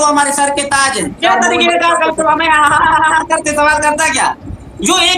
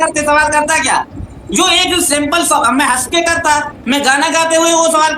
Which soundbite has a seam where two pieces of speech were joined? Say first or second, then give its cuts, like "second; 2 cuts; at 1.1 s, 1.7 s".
first; 1 cut; at 1.2 s